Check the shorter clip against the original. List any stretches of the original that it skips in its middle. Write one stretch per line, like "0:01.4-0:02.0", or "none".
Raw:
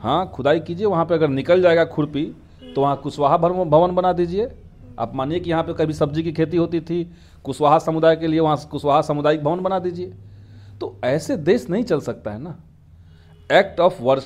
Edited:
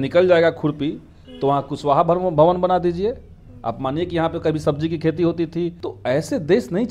0:07.2-0:10.8